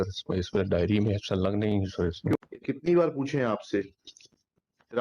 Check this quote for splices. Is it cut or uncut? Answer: cut